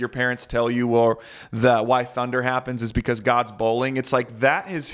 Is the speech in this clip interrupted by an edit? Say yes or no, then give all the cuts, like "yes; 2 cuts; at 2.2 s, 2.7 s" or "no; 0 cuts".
no; 0 cuts